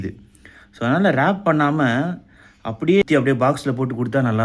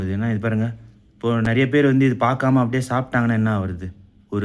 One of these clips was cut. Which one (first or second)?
first